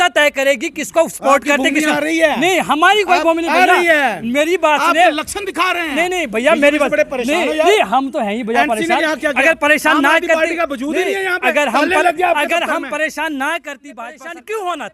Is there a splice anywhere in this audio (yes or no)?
yes